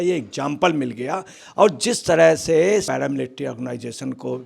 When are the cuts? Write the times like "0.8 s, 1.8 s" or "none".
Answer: 1.3 s